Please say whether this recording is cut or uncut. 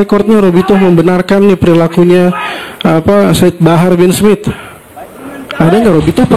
uncut